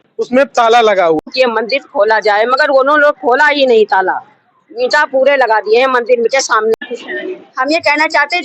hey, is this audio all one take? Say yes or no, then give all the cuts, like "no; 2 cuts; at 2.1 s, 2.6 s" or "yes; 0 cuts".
no; 2 cuts; at 1.2 s, 6.7 s